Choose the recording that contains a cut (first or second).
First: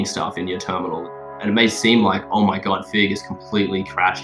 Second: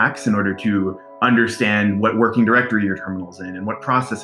first